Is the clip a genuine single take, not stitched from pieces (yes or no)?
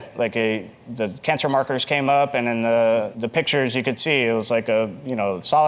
yes